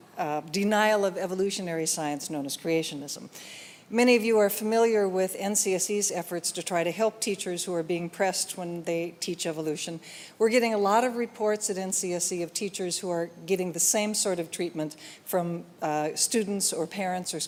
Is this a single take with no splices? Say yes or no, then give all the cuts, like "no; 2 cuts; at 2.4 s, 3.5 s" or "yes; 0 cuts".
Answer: yes; 0 cuts